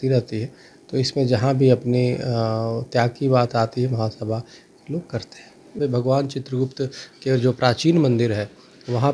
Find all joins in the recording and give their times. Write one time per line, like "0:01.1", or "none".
0:05.7